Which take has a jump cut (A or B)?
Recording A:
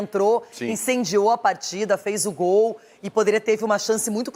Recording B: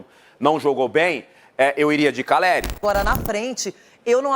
B